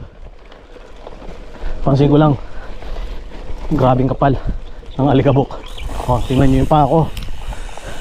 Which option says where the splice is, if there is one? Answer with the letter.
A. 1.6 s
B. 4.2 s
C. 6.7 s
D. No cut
A